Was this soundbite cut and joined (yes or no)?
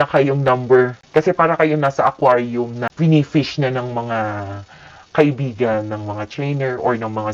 yes